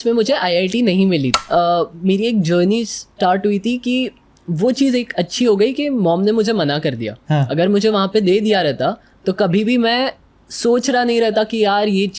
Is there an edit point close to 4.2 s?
no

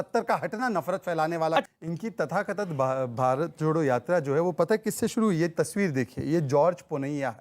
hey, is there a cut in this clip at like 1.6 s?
yes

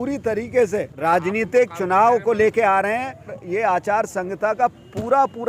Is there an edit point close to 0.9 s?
yes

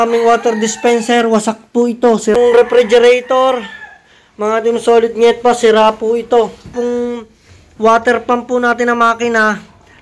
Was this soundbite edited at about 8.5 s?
no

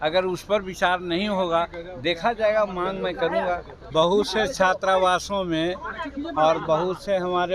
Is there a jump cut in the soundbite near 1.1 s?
no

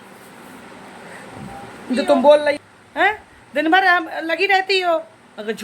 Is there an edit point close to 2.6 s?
yes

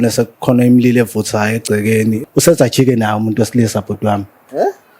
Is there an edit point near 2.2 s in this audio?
yes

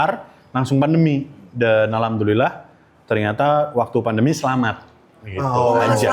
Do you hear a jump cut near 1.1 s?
no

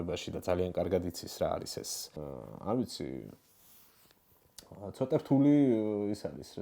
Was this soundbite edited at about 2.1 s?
yes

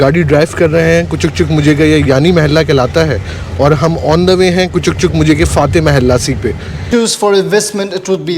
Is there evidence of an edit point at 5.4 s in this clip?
no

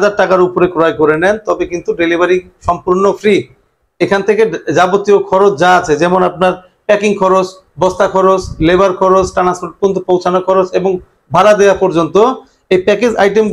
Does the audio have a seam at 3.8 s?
no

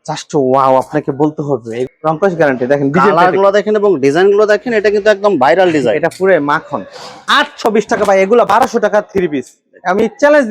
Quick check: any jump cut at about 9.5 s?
no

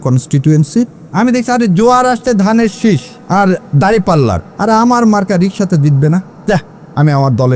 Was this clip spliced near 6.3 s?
yes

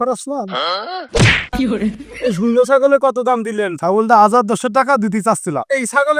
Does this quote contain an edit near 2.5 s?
no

